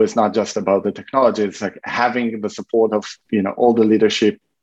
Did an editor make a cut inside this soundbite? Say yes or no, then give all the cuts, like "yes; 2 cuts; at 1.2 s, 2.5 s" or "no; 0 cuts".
yes; 1 cut; at 3.2 s